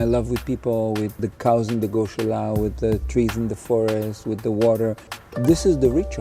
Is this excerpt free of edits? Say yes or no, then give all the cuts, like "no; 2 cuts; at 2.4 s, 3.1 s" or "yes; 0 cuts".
no; 2 cuts; at 1.2 s, 5.1 s